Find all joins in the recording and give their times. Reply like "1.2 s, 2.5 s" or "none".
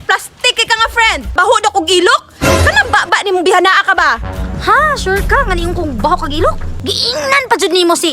1.3 s, 6.7 s